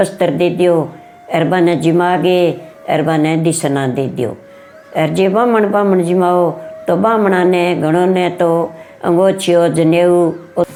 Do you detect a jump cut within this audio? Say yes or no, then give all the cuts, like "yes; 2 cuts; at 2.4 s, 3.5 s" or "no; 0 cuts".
no; 0 cuts